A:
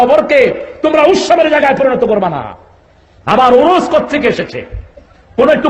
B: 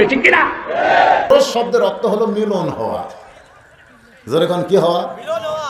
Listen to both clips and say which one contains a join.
B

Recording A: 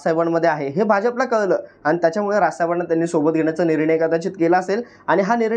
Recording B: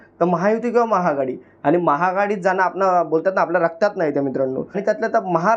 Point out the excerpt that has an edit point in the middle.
B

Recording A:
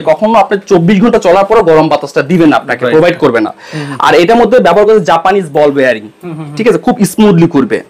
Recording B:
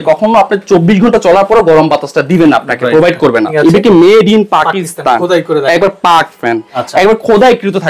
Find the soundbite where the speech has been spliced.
B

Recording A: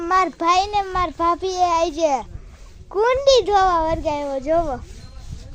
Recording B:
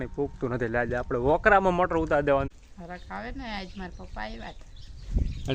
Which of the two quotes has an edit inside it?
B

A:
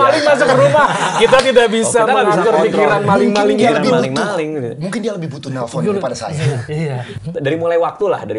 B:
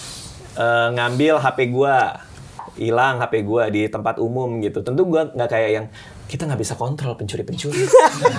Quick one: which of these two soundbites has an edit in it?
A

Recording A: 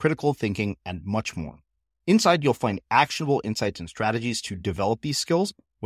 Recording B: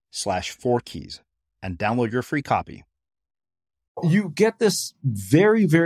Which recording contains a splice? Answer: B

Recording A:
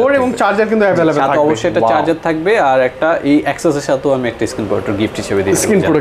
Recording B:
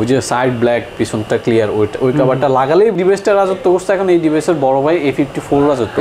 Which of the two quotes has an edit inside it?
B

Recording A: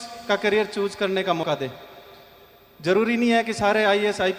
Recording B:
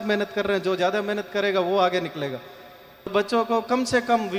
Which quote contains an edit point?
B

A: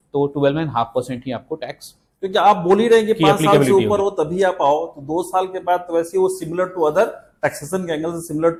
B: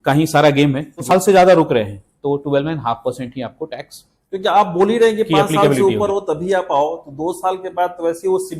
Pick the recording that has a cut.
B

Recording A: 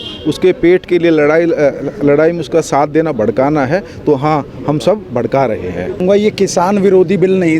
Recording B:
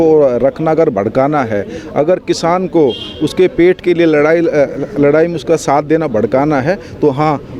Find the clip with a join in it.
A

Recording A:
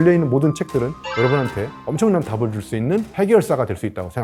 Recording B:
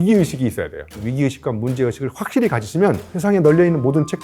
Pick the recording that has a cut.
B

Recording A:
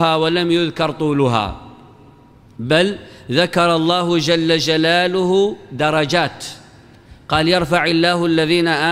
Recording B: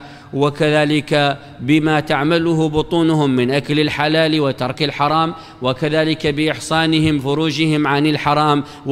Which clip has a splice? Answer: B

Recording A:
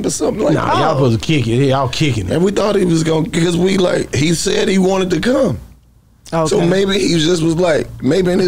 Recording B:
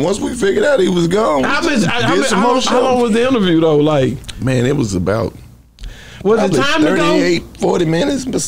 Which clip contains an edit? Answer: B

